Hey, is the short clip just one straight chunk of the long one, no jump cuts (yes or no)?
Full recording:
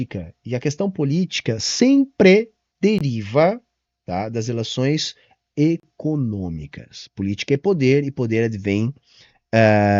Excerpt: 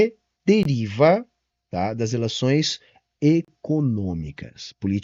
yes